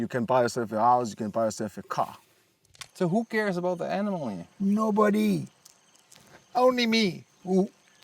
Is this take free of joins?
no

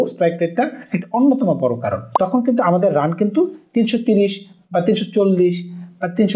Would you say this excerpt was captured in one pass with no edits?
no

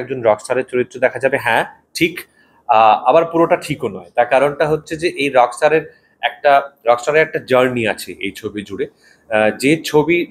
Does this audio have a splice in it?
no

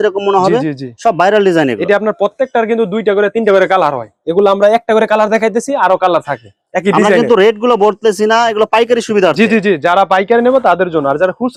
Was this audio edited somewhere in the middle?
no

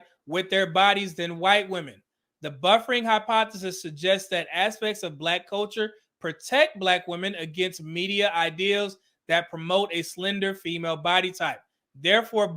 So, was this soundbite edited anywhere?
no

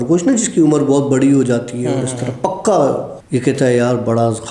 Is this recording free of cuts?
no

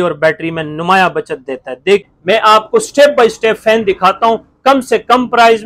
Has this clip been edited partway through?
yes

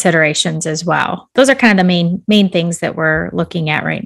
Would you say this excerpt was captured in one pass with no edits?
no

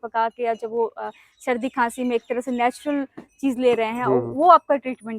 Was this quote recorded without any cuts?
yes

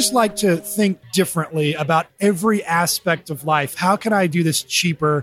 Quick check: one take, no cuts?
no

